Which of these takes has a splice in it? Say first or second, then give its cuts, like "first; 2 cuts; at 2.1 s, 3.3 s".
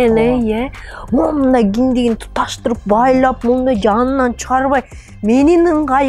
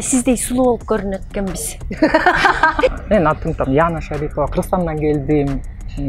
second; 1 cut; at 2.9 s